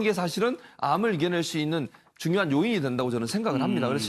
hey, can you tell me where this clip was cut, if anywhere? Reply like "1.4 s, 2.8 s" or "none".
none